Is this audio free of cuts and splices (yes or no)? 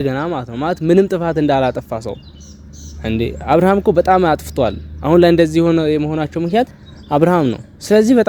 yes